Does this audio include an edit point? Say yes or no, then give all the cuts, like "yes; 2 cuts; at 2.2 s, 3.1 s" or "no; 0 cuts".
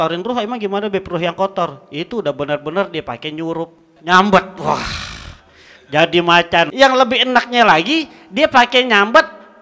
yes; 2 cuts; at 3.9 s, 6.7 s